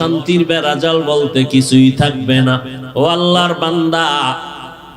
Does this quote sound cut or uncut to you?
cut